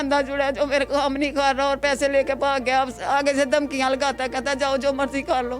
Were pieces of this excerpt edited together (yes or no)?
no